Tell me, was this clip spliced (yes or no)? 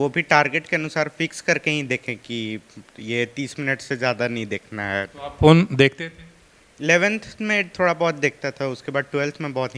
no